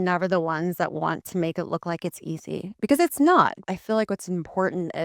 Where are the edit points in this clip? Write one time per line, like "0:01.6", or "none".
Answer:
0:03.6